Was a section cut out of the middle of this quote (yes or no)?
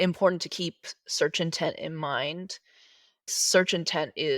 yes